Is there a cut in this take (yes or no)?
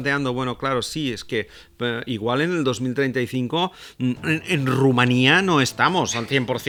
no